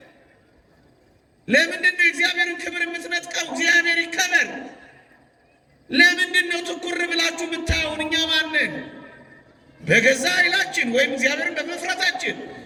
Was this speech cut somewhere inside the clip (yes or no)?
no